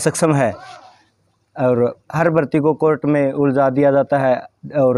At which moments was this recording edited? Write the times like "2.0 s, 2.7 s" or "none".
none